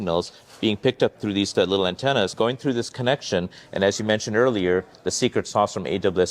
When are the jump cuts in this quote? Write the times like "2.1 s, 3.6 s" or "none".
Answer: 1.2 s, 2.3 s